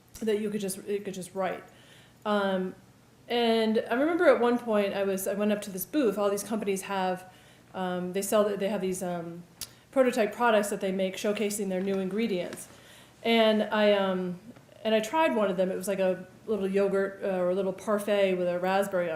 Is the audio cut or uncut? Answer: uncut